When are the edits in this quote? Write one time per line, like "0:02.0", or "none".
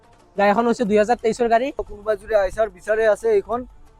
0:01.9